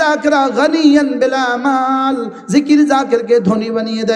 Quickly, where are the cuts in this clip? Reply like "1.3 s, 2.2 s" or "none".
none